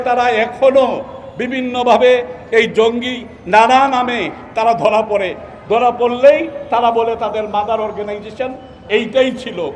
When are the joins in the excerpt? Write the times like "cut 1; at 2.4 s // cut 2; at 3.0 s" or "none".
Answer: none